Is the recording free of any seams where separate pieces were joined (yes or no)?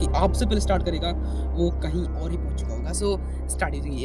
yes